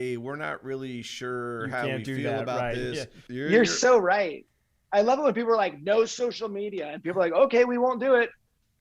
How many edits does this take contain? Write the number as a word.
one